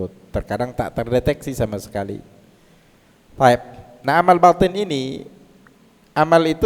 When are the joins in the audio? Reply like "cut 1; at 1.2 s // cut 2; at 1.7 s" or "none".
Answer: none